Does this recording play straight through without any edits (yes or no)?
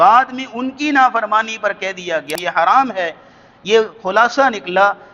no